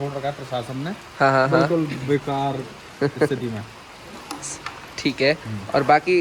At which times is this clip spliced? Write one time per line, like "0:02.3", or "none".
none